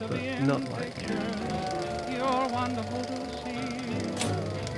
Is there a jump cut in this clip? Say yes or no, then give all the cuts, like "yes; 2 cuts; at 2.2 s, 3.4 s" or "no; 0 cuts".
yes; 1 cut; at 1.2 s